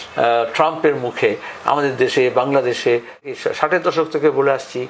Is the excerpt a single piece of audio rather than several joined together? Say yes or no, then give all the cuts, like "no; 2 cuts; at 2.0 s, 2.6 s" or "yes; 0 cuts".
no; 1 cut; at 3.3 s